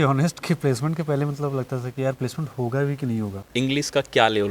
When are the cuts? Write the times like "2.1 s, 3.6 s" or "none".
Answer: 3.4 s